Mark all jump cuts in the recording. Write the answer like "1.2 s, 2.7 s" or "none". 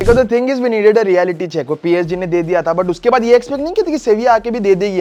none